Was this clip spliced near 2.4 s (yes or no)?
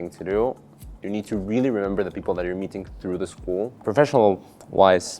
no